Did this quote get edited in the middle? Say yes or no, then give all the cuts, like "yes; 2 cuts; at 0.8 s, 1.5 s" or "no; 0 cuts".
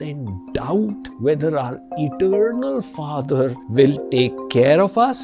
yes; 2 cuts; at 1.1 s, 3.6 s